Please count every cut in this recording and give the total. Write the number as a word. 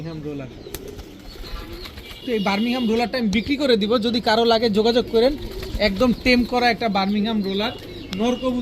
one